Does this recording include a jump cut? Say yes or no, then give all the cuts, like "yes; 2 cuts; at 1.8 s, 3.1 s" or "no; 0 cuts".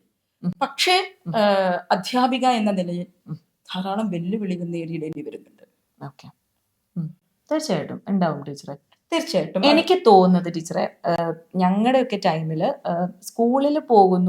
no; 0 cuts